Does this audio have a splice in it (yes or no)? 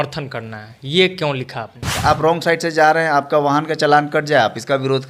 yes